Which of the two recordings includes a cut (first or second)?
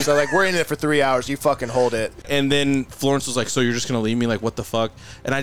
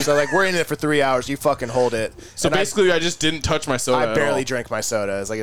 first